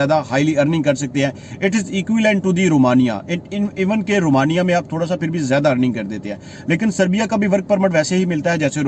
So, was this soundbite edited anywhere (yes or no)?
no